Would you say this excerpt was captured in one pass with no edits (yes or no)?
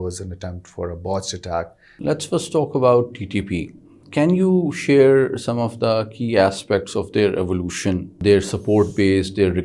no